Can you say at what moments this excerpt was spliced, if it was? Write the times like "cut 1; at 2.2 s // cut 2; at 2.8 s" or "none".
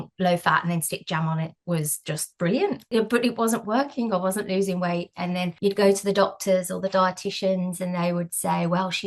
cut 1; at 2.8 s // cut 2; at 5.5 s